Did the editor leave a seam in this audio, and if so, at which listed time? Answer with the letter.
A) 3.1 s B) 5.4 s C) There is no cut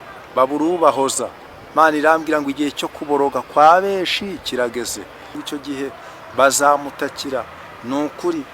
B